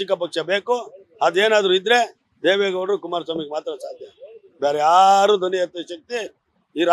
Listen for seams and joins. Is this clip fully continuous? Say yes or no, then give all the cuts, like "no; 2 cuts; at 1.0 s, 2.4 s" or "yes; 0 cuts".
yes; 0 cuts